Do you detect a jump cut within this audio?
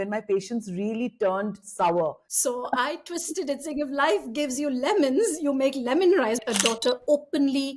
yes; 2 cuts; at 2.3 s, 6.4 s

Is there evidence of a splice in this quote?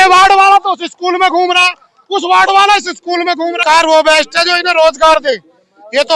yes; 1 cut; at 3.6 s

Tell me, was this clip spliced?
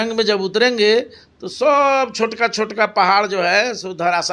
no; 0 cuts

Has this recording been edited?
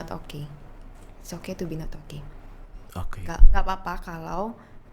no; 0 cuts

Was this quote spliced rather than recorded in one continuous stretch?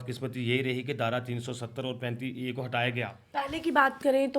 yes; 1 cut; at 3.2 s

